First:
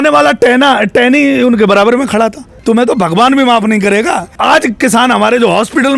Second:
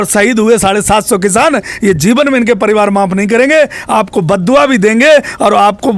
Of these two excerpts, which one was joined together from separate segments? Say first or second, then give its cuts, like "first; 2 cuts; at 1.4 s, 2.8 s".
first; 2 cuts; at 2.5 s, 4.3 s